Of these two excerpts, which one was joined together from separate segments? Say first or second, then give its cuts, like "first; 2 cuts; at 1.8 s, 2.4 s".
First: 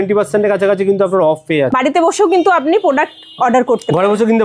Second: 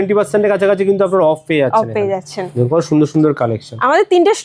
first; 1 cut; at 1.7 s